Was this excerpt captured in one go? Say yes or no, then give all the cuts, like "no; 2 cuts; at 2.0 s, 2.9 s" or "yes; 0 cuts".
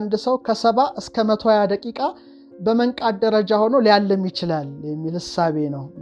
yes; 0 cuts